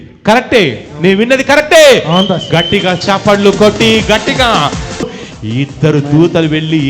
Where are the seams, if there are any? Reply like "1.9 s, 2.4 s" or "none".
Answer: 5.2 s